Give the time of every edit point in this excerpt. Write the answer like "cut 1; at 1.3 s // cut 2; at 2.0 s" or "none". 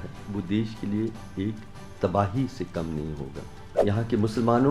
cut 1; at 3.7 s